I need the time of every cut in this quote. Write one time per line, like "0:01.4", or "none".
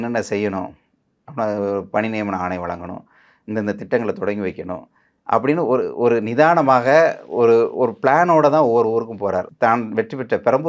0:09.5